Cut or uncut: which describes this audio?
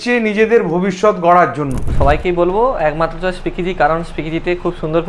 cut